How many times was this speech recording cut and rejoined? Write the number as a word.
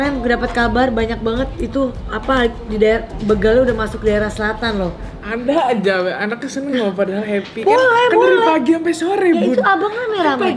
one